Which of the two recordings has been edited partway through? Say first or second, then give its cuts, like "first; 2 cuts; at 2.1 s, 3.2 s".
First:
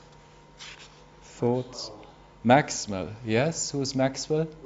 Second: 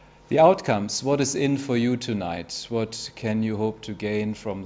second; 1 cut; at 2.9 s